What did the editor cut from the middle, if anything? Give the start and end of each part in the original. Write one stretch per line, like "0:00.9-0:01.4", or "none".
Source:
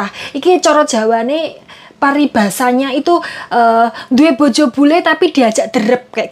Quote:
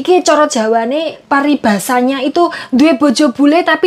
0:01.5-0:01.9
0:03.3-0:04.0